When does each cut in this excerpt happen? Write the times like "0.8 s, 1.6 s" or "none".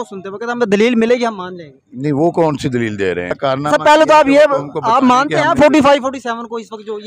3.4 s